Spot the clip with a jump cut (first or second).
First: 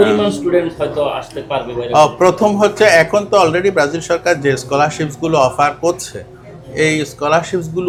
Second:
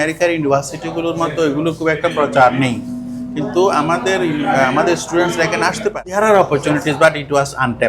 second